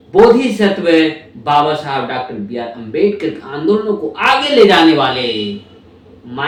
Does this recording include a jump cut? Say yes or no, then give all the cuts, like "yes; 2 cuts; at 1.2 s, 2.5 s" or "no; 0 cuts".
no; 0 cuts